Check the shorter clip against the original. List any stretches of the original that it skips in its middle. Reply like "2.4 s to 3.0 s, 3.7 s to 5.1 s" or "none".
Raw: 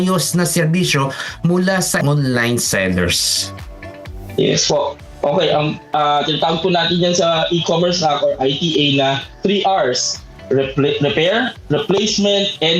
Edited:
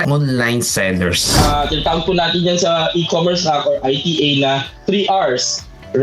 3.2 s to 5.8 s